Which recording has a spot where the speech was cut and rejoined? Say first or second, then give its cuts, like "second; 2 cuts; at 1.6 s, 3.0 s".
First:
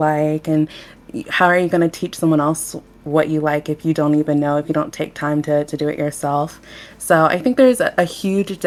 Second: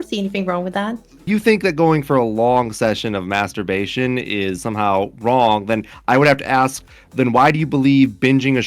second; 1 cut; at 1.2 s